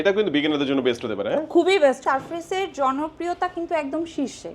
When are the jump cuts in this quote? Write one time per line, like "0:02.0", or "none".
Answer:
0:02.0